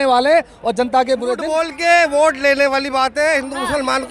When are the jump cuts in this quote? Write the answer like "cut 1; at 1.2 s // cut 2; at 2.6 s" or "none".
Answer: cut 1; at 1.7 s